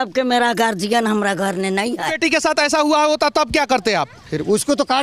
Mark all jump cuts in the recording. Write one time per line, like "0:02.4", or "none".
0:02.1